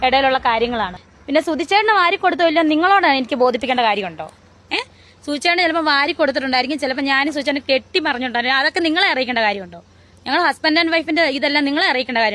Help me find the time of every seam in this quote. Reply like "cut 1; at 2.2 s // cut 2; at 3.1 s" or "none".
cut 1; at 1.0 s

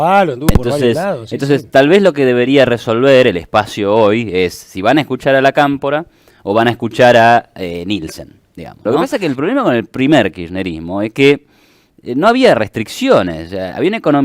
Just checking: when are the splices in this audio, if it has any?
cut 1; at 8.7 s

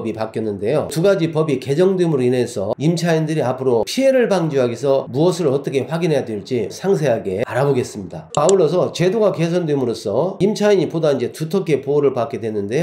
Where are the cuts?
cut 1; at 0.9 s // cut 2; at 3.9 s

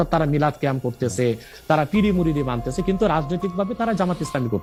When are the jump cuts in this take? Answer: none

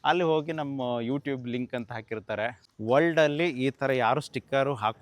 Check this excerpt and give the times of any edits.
cut 1; at 2.6 s

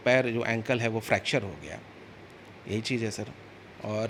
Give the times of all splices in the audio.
none

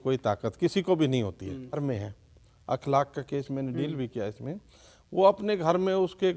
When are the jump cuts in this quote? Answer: cut 1; at 1.8 s

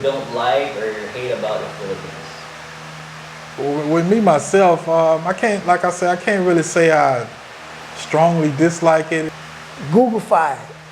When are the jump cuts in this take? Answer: cut 1; at 9.3 s

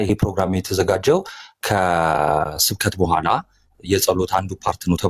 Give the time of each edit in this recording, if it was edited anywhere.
none

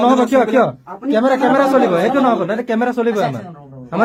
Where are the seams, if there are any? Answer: none

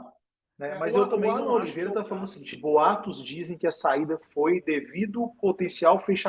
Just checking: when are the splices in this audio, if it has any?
cut 1; at 1.2 s

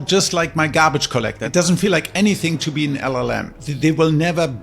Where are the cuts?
cut 1; at 1.4 s // cut 2; at 3.8 s

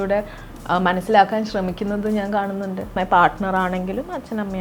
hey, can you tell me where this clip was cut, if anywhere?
cut 1; at 2.9 s

